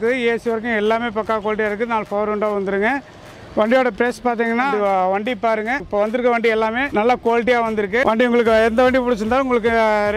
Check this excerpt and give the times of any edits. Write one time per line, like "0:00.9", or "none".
0:04.7
0:05.9
0:06.8
0:08.0

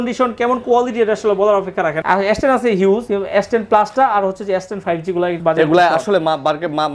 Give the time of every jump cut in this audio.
0:02.0
0:03.1
0:05.4

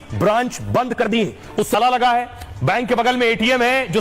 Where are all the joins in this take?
0:01.7

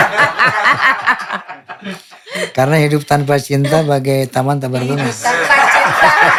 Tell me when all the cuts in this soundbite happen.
none

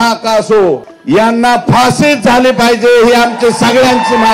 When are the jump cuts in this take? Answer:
0:00.9

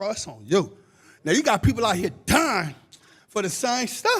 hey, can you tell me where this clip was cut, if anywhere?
0:02.1

